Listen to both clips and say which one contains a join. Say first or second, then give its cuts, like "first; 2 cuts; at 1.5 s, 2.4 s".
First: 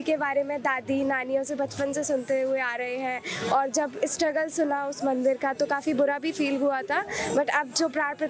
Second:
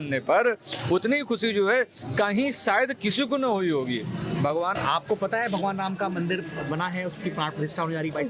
second; 1 cut; at 4.8 s